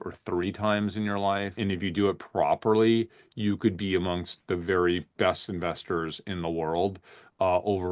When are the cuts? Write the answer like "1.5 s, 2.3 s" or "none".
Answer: 1.6 s